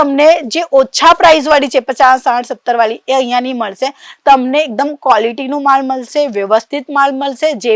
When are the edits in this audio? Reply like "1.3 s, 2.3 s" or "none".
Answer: none